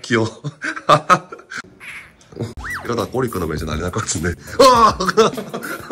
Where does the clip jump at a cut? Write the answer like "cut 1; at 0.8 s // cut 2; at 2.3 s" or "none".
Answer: cut 1; at 2.6 s